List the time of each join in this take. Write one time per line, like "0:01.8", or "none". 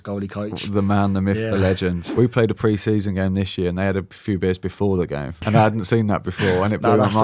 0:02.1
0:05.4